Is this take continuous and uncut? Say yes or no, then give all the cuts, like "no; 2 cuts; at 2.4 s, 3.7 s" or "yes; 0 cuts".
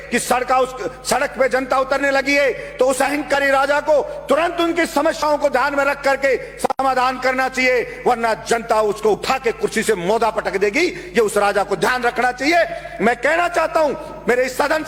yes; 0 cuts